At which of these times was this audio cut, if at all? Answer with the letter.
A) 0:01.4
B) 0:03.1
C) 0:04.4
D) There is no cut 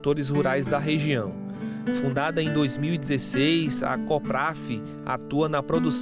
D